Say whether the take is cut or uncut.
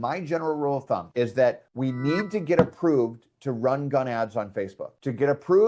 cut